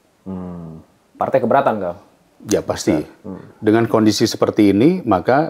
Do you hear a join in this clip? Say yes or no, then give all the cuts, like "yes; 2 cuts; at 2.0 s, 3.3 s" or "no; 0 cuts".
no; 0 cuts